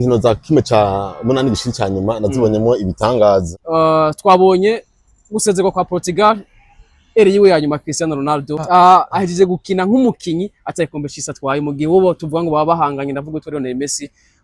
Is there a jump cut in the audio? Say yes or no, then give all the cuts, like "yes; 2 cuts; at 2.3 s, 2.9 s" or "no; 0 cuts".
yes; 2 cuts; at 3.5 s, 8.6 s